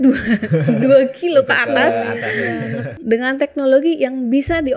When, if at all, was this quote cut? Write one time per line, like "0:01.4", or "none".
0:02.9